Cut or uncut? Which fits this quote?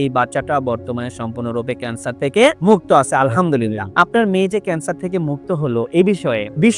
uncut